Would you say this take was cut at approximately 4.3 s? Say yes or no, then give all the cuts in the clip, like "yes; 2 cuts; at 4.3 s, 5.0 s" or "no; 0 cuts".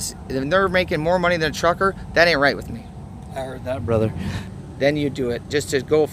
yes; 1 cut; at 4.3 s